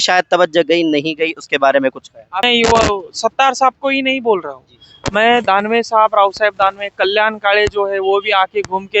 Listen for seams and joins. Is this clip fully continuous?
no; 1 cut; at 2.5 s

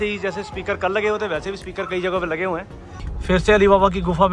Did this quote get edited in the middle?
yes; 1 cut; at 3.1 s

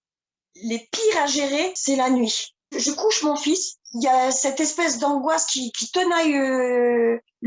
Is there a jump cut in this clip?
yes; 2 cuts; at 1.8 s, 3.8 s

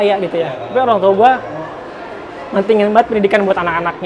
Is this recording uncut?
yes; 0 cuts

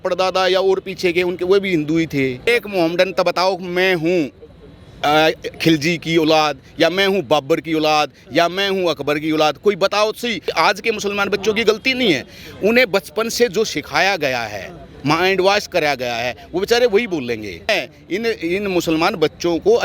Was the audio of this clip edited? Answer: yes; 3 cuts; at 2.5 s, 10.5 s, 17.7 s

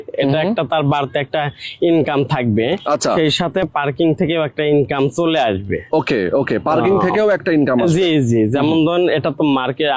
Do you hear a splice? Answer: no; 0 cuts

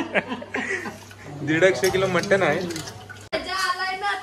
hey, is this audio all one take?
no; 1 cut; at 3.3 s

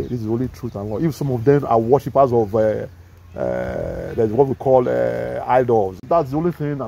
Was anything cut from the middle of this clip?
yes; 1 cut; at 6.0 s

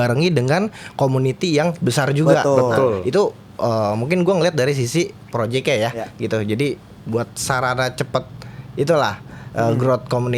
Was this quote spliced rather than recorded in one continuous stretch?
no; 0 cuts

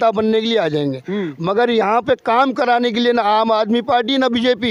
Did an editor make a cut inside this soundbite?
no; 0 cuts

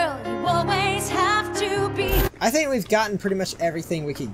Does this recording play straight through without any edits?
no; 1 cut; at 2.3 s

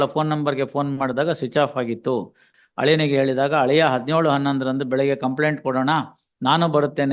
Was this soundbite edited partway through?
yes; 1 cut; at 2.5 s

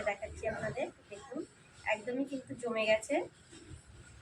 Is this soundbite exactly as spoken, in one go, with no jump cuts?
yes; 0 cuts

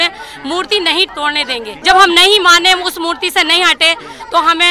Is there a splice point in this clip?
yes; 1 cut; at 1.7 s

